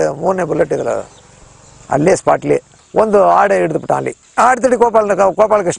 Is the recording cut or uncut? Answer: cut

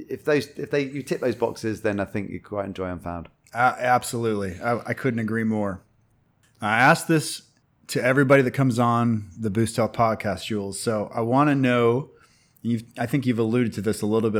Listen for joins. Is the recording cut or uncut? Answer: uncut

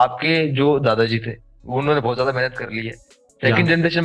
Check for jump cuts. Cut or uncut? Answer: uncut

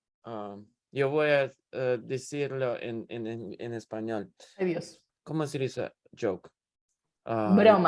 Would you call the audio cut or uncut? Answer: cut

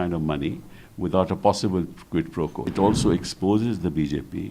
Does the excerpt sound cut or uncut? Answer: cut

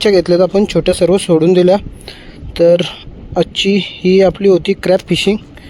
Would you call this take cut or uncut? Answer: uncut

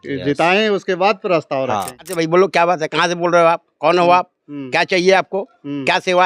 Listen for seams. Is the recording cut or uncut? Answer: cut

